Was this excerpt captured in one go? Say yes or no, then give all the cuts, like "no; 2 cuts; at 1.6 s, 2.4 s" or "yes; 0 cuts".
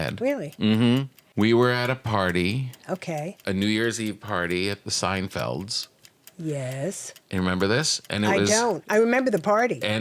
no; 1 cut; at 1.2 s